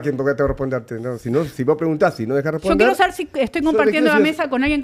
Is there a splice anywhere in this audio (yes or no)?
no